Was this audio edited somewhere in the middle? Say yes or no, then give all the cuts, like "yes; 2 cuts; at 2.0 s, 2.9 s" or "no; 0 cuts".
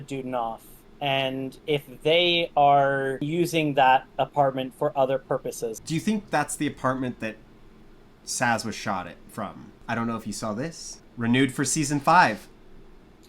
yes; 4 cuts; at 1.6 s, 3.3 s, 5.7 s, 9.7 s